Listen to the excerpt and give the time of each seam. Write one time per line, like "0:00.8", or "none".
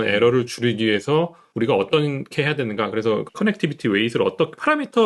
0:01.4
0:03.3